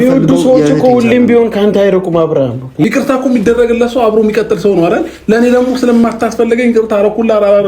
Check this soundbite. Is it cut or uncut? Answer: cut